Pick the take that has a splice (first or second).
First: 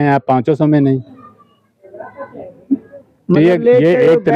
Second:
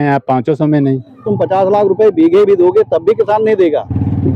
second